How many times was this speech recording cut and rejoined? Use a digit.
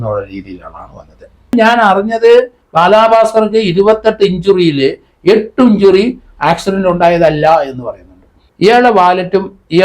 2